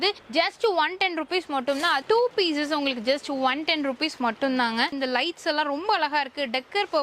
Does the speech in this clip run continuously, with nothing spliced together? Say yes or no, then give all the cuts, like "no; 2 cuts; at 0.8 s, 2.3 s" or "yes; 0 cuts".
no; 2 cuts; at 2.0 s, 4.9 s